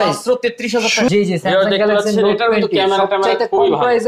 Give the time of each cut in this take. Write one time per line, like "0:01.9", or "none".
0:01.1